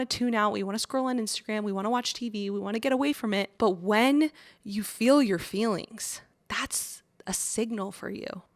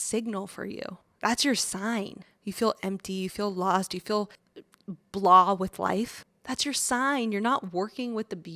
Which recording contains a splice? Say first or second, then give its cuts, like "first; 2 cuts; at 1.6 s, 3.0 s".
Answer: first; 1 cut; at 3.5 s